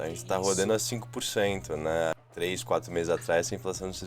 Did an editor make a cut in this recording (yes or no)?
yes